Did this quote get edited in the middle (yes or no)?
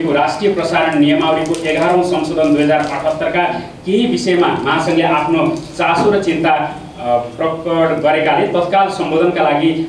no